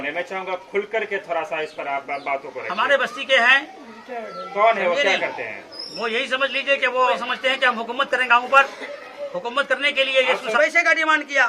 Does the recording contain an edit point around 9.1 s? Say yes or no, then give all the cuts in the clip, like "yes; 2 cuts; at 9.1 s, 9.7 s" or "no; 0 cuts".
no; 2 cuts; at 7.3 s, 10.6 s